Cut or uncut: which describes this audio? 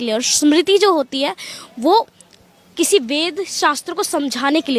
uncut